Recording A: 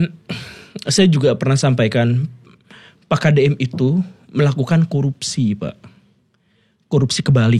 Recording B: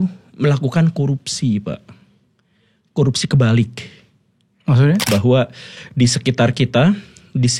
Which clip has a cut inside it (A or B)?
B